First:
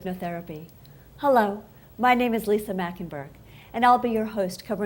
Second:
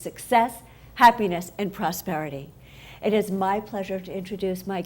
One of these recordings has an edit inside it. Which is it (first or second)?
second